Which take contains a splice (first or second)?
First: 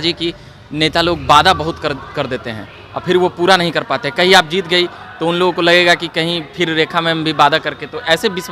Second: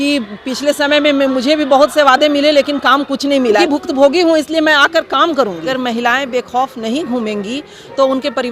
second